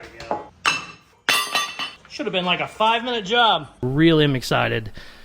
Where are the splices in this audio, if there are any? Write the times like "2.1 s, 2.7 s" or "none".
3.8 s